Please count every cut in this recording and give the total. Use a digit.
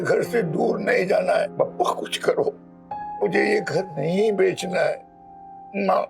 2